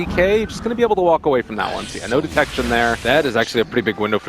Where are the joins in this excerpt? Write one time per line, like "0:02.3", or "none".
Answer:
0:02.2